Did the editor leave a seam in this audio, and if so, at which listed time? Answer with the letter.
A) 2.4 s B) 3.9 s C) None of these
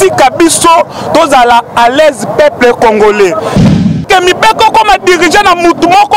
B